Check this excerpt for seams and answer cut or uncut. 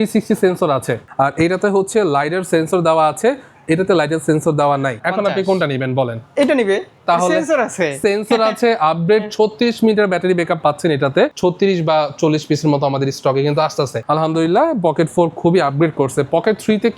cut